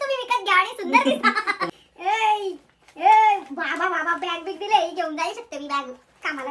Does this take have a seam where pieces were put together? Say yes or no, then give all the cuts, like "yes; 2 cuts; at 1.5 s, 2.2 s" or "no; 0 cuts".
yes; 1 cut; at 1.6 s